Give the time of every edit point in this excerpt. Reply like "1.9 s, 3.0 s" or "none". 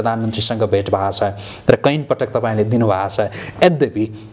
none